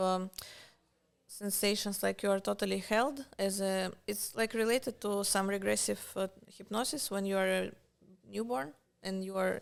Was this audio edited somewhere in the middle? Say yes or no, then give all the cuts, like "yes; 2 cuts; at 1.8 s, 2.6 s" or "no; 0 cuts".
no; 0 cuts